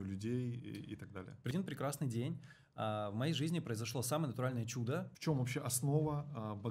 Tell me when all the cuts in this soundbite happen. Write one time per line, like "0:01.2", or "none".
0:01.5
0:05.1